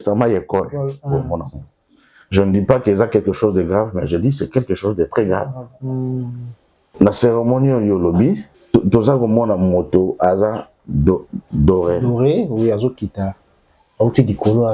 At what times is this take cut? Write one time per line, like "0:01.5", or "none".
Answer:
0:06.8